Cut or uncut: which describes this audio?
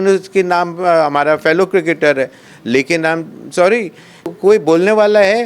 cut